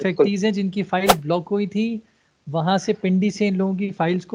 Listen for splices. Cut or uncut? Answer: uncut